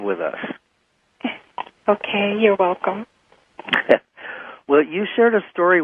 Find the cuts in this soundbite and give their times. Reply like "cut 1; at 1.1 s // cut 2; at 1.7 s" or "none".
none